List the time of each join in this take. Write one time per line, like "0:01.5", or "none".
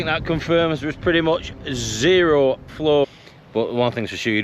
0:03.0